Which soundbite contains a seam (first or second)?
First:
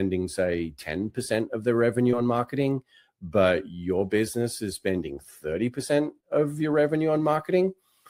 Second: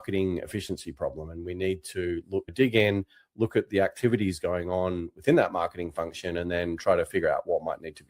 second